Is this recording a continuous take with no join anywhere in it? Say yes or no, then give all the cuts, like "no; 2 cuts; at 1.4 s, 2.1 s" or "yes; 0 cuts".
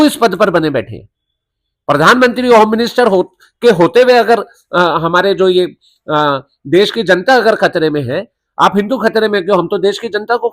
yes; 0 cuts